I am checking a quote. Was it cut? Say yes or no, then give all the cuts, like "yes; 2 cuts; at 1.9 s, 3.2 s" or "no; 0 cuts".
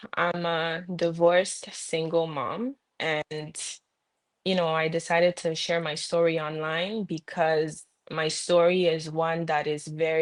no; 0 cuts